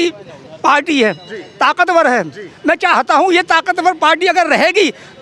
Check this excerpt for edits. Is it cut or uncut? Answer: uncut